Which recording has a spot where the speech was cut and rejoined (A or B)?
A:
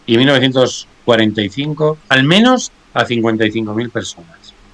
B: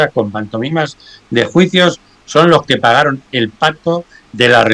A